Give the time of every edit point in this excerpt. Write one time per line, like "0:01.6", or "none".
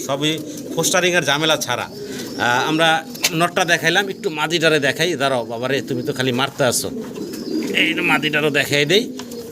none